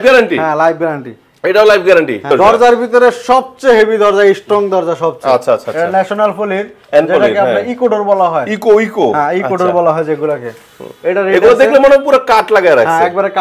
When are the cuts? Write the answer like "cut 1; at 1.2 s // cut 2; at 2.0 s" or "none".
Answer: cut 1; at 2.2 s